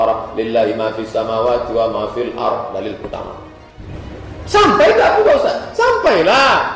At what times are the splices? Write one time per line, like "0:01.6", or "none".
0:03.9